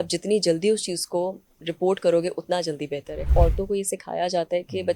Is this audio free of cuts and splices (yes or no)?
no